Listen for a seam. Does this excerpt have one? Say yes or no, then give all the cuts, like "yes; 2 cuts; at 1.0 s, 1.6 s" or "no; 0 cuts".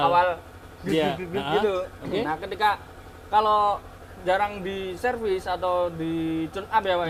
no; 0 cuts